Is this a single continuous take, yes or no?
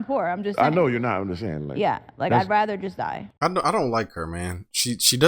no